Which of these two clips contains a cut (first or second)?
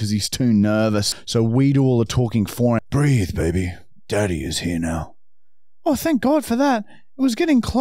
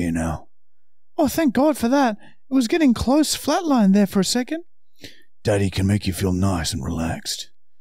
first